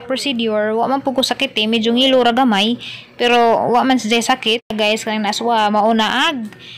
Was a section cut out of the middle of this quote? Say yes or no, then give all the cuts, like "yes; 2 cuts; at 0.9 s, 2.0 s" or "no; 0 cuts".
yes; 1 cut; at 4.7 s